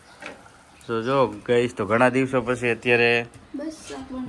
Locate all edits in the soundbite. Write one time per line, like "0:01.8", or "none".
none

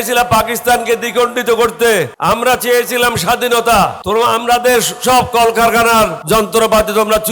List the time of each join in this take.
0:02.1
0:04.0
0:06.2

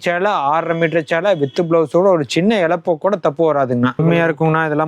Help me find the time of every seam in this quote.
0:04.0

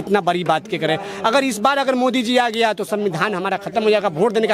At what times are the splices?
none

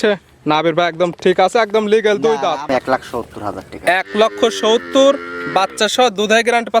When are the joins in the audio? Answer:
0:02.7

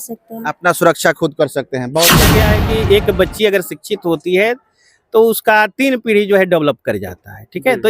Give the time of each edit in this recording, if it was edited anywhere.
0:02.2

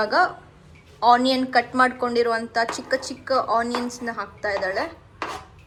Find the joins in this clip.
none

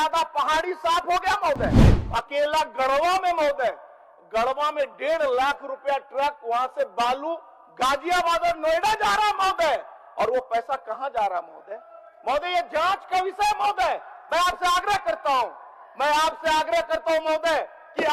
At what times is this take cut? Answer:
0:02.0

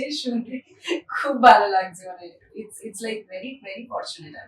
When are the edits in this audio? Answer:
none

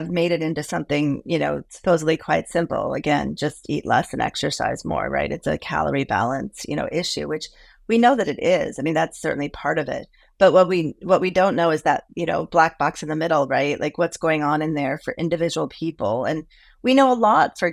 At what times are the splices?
none

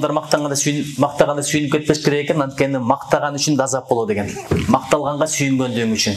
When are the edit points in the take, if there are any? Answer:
none

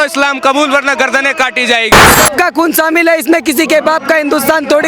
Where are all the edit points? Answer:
0:02.1

